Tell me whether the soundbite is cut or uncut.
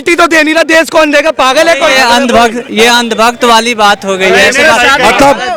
uncut